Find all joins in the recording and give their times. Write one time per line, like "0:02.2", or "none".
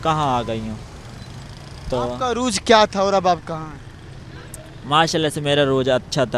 none